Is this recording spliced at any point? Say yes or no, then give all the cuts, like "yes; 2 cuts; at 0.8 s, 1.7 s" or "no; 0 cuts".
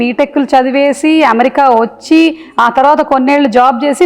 no; 0 cuts